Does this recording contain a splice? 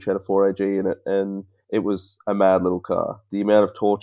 no; 0 cuts

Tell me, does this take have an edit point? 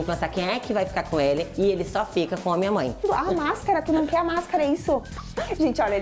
yes; 2 cuts; at 3.1 s, 5.2 s

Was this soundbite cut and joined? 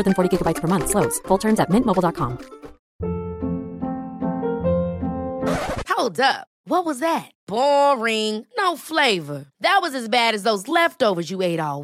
yes; 1 cut; at 2.8 s

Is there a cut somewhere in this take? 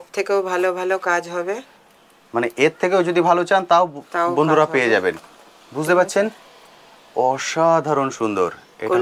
no; 0 cuts

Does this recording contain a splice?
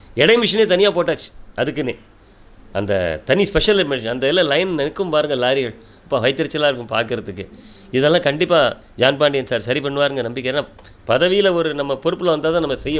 no; 0 cuts

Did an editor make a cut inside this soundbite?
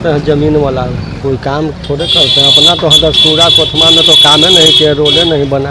no; 0 cuts

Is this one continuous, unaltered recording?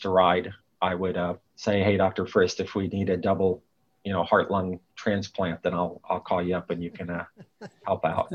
no; 1 cut; at 1.5 s

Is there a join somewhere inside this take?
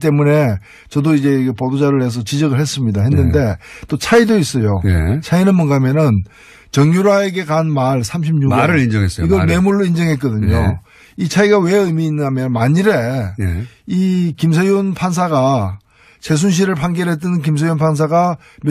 yes; 1 cut; at 11.2 s

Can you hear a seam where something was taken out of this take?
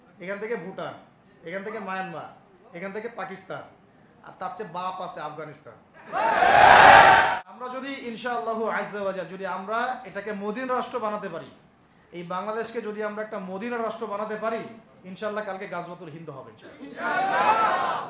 yes; 1 cut; at 7.2 s

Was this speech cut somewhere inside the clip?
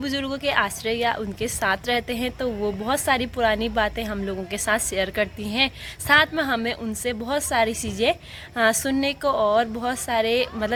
no; 0 cuts

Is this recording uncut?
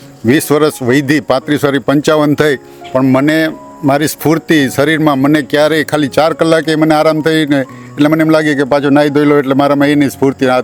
yes; 0 cuts

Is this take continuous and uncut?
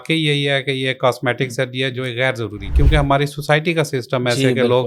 no; 1 cut; at 2.6 s

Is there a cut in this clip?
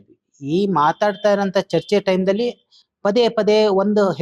no; 0 cuts

